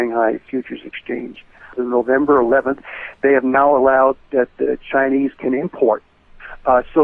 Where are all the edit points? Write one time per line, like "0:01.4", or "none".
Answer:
0:01.8